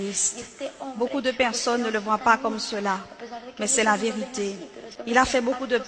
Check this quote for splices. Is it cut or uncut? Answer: cut